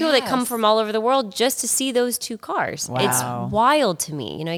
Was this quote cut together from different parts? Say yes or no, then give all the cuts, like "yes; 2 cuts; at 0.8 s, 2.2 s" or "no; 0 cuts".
no; 0 cuts